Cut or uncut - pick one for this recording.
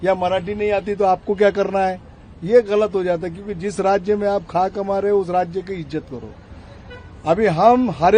uncut